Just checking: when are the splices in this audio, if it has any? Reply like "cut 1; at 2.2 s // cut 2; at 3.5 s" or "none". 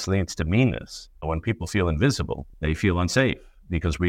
cut 1; at 1.2 s // cut 2; at 2.4 s